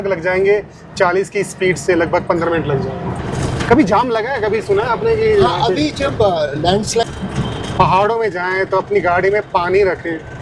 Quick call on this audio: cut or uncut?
cut